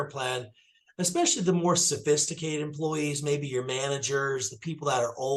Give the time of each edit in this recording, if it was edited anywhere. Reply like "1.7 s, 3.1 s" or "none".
none